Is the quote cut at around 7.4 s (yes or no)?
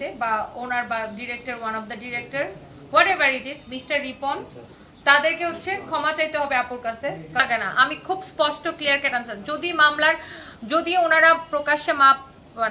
yes